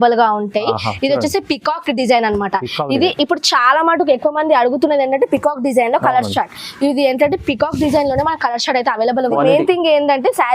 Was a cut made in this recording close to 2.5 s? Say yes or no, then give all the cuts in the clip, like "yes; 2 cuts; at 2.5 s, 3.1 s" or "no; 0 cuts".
no; 1 cut; at 9.3 s